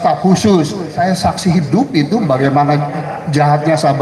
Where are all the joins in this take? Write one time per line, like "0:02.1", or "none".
0:00.9